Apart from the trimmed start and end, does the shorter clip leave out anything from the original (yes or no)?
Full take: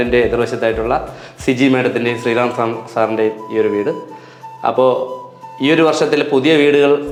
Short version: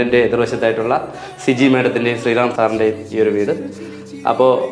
yes